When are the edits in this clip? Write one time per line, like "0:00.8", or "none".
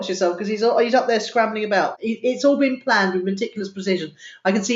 0:02.0